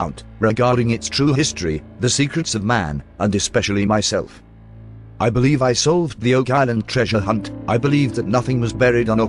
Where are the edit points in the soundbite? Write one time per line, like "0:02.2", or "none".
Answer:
0:01.3